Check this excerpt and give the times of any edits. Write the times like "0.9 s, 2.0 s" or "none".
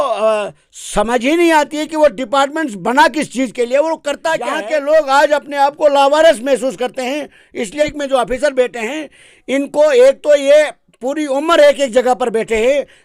4.5 s, 7.8 s